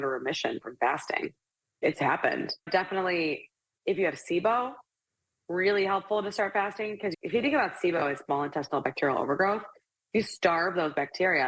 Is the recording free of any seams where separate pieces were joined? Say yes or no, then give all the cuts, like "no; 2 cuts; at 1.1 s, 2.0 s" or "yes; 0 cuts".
no; 2 cuts; at 2.5 s, 7.2 s